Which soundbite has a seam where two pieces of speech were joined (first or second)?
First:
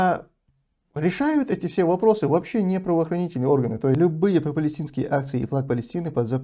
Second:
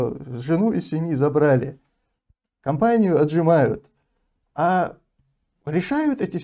first